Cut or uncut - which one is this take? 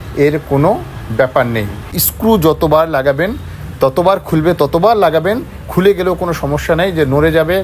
cut